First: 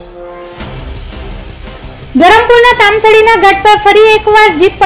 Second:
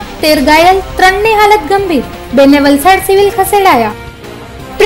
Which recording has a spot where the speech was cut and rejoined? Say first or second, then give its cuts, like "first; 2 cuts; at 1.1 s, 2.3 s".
first; 1 cut; at 1.9 s